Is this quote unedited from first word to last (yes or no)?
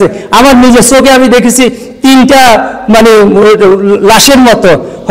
yes